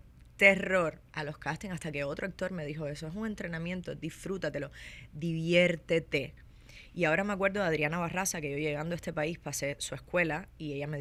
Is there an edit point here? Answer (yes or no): no